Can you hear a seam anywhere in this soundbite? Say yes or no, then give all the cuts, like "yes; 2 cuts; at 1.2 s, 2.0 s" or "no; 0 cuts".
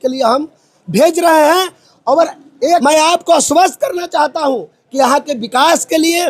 yes; 1 cut; at 2.8 s